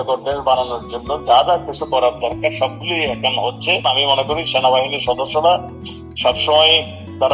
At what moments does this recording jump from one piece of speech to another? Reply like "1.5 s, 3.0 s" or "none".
3.8 s